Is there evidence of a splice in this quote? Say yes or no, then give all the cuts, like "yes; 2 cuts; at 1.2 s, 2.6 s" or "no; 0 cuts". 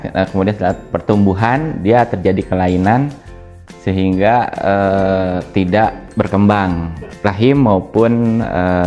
no; 0 cuts